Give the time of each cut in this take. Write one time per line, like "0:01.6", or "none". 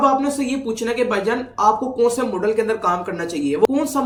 none